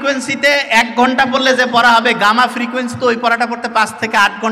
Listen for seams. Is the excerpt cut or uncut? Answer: uncut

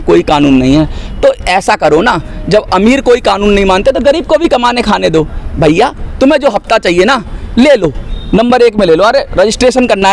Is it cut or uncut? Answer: uncut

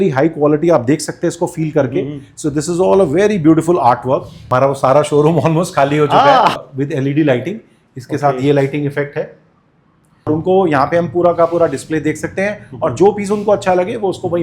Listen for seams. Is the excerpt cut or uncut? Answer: cut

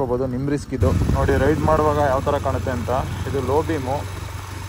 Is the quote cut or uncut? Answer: uncut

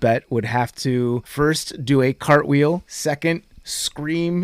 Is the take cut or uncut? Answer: cut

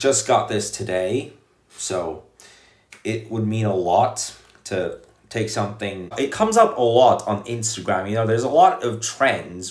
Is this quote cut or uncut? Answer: cut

